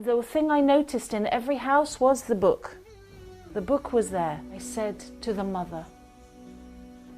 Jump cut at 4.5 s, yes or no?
yes